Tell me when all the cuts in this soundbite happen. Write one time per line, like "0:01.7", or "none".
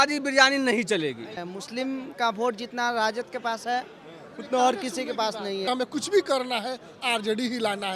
0:01.4
0:05.7